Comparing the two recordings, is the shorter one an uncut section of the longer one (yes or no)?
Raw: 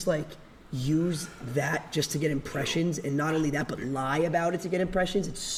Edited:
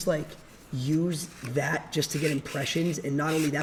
yes